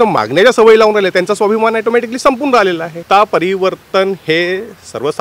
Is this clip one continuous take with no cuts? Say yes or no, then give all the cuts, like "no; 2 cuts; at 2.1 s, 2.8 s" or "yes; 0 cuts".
no; 1 cut; at 3.0 s